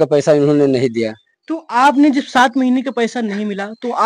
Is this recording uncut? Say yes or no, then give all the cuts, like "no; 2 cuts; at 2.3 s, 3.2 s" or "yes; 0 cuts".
yes; 0 cuts